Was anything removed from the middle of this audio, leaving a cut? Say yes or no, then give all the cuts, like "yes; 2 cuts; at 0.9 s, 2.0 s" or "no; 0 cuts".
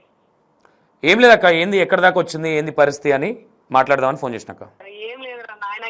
yes; 1 cut; at 4.9 s